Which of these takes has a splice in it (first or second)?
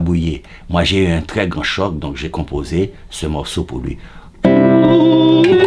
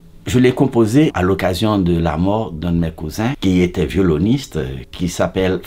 second